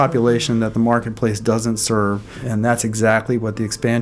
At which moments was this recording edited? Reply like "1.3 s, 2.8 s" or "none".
2.4 s